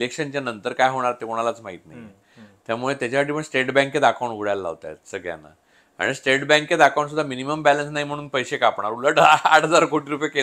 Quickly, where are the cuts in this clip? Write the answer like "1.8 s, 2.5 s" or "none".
none